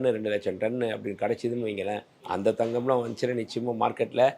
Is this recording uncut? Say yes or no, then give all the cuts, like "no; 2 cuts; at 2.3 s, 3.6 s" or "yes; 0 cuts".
no; 1 cut; at 2.1 s